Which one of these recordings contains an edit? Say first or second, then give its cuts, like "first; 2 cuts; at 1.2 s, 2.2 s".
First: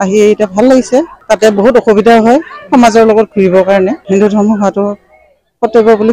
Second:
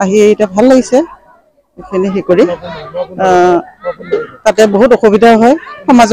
first; 2 cuts; at 1.2 s, 4.0 s